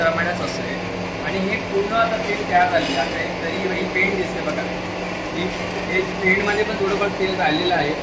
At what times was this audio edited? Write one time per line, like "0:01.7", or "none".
none